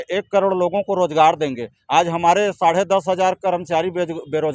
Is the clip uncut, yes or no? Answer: yes